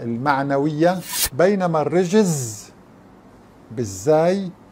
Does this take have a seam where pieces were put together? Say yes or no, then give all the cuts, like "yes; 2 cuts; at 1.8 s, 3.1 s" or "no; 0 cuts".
yes; 1 cut; at 1.2 s